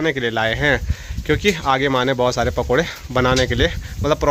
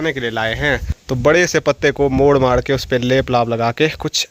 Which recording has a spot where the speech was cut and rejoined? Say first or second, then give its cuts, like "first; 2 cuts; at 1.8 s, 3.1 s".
second; 1 cut; at 0.9 s